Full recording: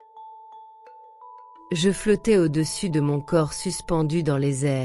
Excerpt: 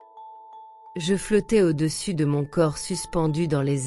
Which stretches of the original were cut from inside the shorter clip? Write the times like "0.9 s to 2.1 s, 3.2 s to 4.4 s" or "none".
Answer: 0.9 s to 1.7 s